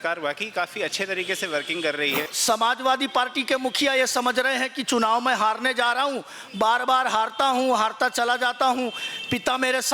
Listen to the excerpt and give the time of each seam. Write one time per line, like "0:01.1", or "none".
0:02.3